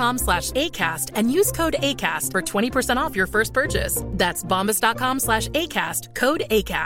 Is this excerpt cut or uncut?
uncut